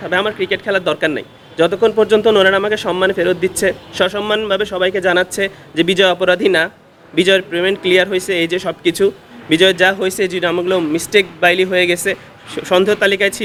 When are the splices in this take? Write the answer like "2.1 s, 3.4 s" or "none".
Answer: none